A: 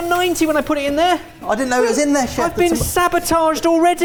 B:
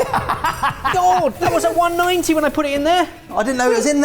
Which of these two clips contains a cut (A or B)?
B